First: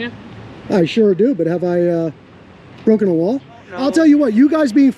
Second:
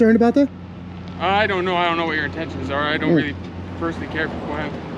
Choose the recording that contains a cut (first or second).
first